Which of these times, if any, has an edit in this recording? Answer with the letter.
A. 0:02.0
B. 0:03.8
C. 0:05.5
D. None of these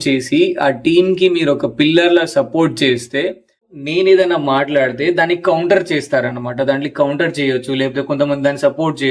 B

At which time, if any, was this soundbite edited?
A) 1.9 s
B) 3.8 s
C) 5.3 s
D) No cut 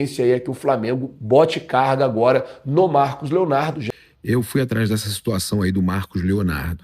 B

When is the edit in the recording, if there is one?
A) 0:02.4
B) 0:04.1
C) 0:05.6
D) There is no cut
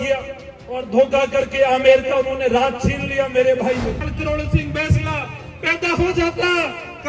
B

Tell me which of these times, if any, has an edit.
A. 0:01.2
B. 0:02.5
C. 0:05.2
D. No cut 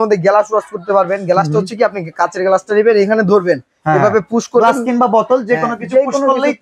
D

